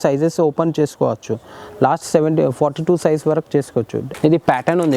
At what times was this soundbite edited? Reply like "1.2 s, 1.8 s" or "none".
4.0 s